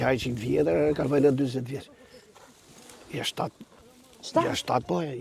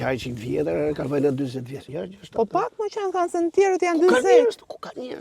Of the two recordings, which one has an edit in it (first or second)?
second